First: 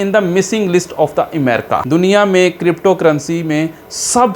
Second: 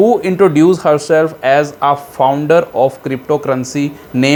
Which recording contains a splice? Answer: first; 1 cut; at 1.8 s

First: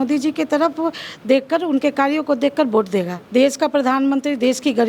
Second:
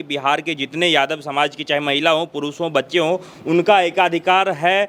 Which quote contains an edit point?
first; 1 cut; at 3.2 s

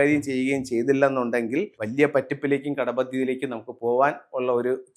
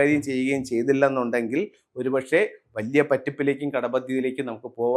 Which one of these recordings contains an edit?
first; 1 cut; at 1.8 s

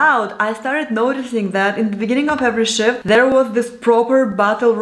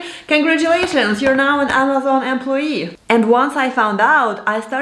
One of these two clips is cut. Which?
second; 1 cut; at 2.9 s

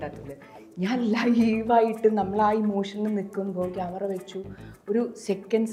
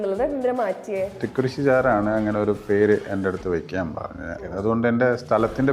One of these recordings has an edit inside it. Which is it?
second; 2 cuts; at 1.2 s, 4.4 s

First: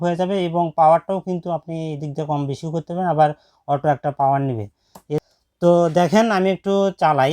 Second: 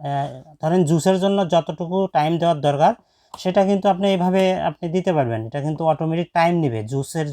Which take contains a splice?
first; 1 cut; at 5.2 s

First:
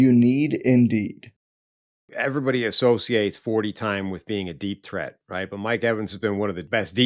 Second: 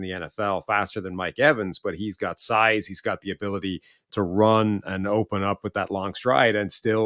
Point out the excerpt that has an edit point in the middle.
first; 1 cut; at 1.8 s

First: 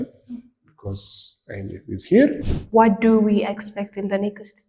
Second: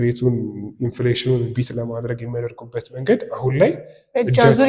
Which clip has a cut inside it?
first; 1 cut; at 2.4 s

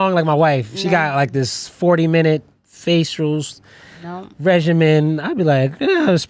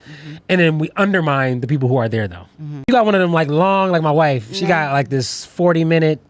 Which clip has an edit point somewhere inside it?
second; 1 cut; at 2.8 s

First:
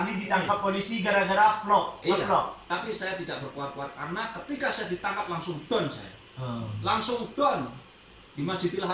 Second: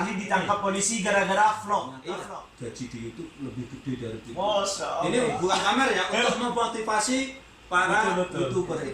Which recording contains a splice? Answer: second; 1 cut; at 2.0 s

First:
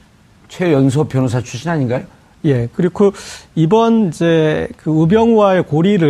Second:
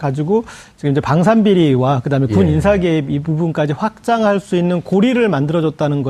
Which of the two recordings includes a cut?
first; 1 cut; at 3.6 s

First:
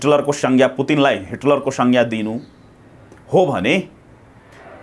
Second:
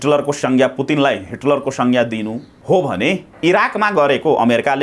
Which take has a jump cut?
second; 2 cuts; at 2.5 s, 3.3 s

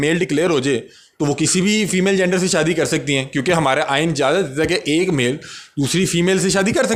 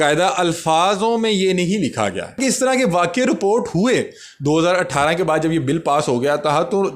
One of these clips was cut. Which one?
second; 1 cut; at 2.4 s

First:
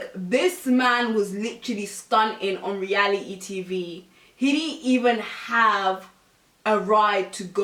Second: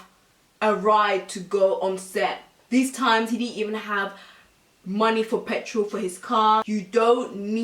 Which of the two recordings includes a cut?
second; 2 cuts; at 2.5 s, 6.7 s

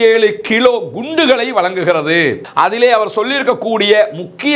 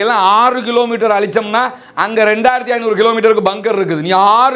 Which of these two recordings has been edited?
first; 1 cut; at 2.4 s

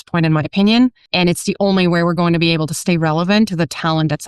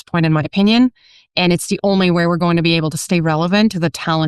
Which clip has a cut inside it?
first; 1 cut; at 1.0 s

